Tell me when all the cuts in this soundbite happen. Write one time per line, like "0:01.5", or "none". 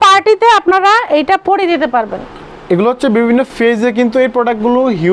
none